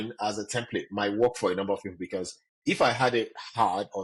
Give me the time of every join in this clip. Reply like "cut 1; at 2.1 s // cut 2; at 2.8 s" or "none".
none